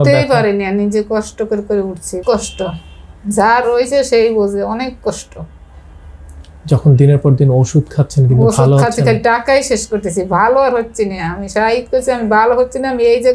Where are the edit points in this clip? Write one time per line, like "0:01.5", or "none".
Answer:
0:02.2